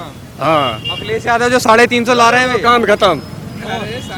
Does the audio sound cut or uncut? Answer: uncut